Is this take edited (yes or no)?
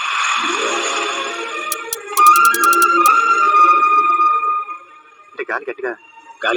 yes